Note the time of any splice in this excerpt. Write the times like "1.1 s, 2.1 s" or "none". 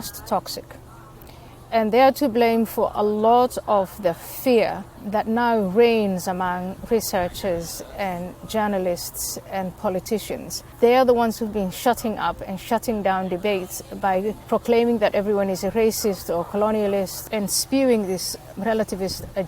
4.9 s, 10.7 s, 14.4 s, 17.3 s, 18.5 s